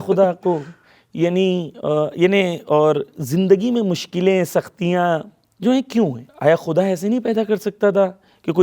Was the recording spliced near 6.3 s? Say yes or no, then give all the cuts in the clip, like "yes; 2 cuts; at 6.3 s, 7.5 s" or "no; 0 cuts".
yes; 1 cut; at 6.3 s